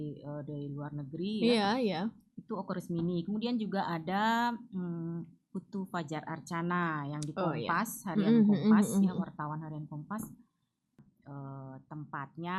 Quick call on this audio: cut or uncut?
cut